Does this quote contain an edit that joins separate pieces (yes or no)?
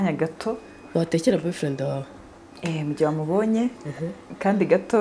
no